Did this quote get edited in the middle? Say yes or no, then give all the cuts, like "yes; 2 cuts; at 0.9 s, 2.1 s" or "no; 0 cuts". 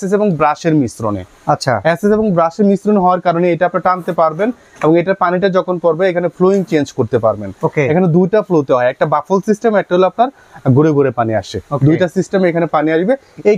no; 0 cuts